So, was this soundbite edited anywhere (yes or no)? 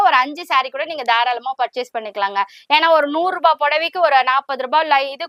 no